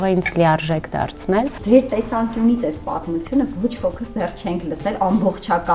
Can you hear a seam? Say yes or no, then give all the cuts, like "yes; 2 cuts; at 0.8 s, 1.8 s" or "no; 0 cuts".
yes; 1 cut; at 1.6 s